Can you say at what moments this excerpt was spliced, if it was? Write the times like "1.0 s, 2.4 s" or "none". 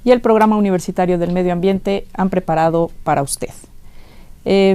3.6 s